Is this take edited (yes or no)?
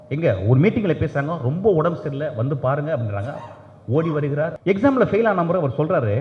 yes